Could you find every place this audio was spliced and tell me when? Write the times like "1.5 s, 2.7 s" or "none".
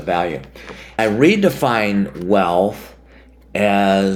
1.0 s